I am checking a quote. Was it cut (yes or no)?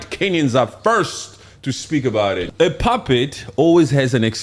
yes